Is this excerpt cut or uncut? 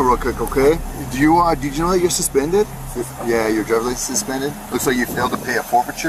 uncut